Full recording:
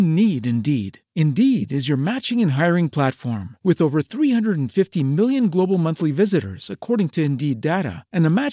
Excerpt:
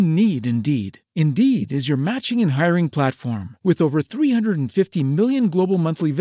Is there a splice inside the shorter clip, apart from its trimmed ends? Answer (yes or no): no